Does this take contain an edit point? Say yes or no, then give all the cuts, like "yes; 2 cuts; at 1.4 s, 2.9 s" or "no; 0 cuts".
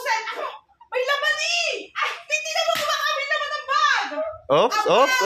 no; 0 cuts